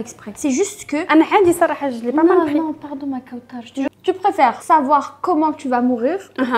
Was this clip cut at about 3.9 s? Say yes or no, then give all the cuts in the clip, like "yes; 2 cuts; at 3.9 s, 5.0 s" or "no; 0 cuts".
yes; 1 cut; at 3.9 s